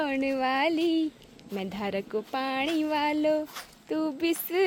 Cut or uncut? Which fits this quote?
uncut